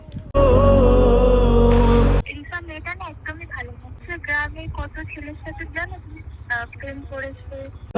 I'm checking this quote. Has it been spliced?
yes; 2 cuts; at 2.2 s, 4.0 s

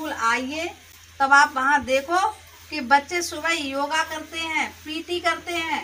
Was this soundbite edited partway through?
yes; 1 cut; at 1.0 s

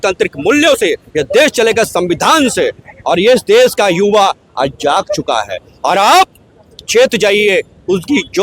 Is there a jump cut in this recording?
no; 0 cuts

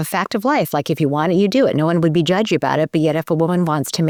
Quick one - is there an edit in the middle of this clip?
no; 0 cuts

